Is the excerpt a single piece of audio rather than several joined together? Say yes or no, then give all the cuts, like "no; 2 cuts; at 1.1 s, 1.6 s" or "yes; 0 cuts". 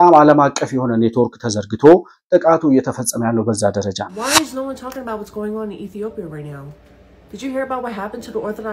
no; 1 cut; at 4.1 s